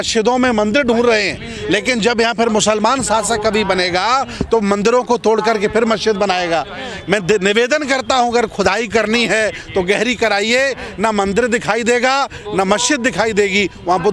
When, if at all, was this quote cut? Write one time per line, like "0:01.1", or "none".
none